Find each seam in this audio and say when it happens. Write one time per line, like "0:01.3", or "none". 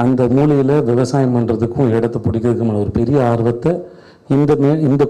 none